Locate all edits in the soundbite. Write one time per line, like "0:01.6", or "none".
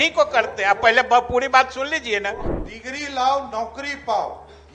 0:02.5